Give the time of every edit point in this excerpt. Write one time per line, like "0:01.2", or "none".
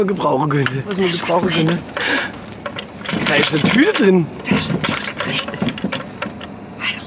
0:00.9
0:03.0
0:05.3